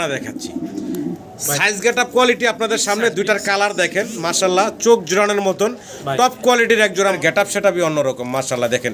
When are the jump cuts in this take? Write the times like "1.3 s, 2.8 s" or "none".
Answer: 7.2 s